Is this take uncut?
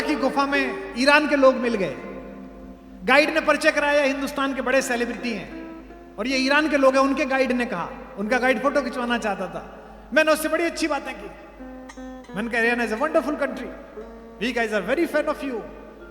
yes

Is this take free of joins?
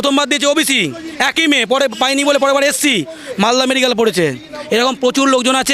yes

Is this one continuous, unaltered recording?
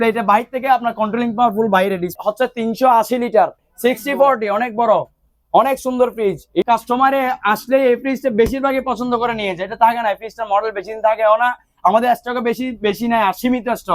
no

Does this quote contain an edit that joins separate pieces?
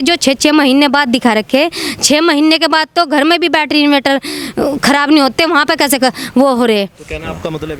no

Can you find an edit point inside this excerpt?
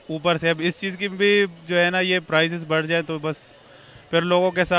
no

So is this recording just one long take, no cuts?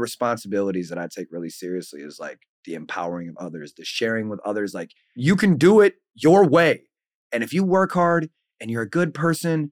yes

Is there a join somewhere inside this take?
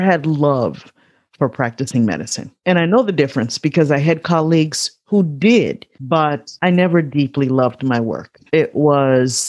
yes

